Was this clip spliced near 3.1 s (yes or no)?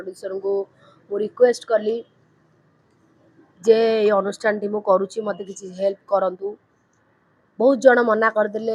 no